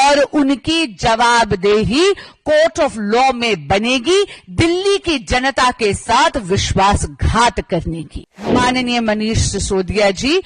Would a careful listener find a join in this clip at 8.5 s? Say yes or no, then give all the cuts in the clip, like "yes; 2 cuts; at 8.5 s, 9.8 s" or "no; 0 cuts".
yes; 1 cut; at 8.5 s